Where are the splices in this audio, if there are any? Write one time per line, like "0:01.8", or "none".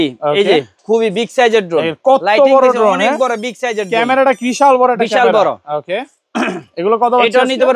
none